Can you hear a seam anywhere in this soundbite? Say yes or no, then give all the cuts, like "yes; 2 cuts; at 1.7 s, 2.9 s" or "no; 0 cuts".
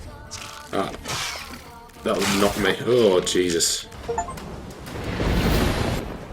yes; 1 cut; at 3.9 s